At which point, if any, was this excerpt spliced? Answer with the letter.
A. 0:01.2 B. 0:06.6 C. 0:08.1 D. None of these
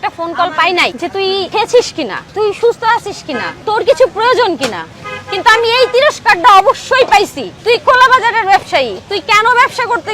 A